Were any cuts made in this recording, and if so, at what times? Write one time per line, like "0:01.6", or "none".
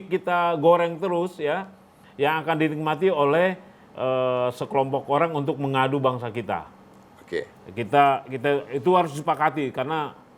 none

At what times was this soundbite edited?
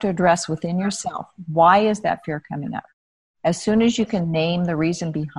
none

